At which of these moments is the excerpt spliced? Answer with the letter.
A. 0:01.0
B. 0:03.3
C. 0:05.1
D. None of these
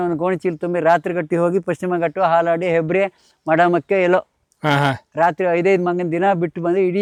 D